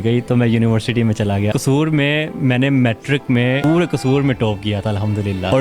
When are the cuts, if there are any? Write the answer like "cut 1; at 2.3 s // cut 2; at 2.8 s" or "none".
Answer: cut 1; at 1.5 s // cut 2; at 3.6 s